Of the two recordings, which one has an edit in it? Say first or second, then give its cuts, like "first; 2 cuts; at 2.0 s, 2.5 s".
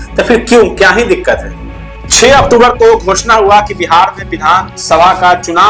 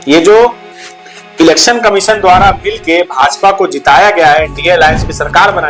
first; 1 cut; at 2.0 s